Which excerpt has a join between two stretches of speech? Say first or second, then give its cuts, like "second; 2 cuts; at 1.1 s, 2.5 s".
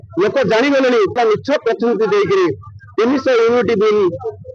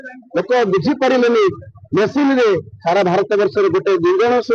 first; 1 cut; at 1.2 s